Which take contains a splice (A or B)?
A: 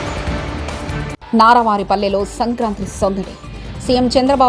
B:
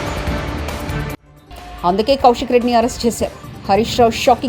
B